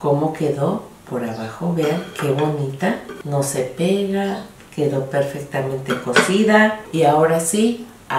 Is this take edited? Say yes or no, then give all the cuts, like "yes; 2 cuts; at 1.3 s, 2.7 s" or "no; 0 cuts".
yes; 2 cuts; at 3.1 s, 6.8 s